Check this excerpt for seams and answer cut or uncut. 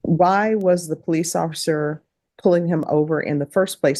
uncut